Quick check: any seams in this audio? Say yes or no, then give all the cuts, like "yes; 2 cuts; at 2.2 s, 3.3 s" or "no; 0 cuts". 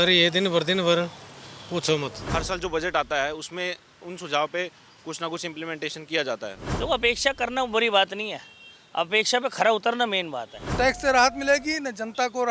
yes; 3 cuts; at 2.2 s, 6.6 s, 10.6 s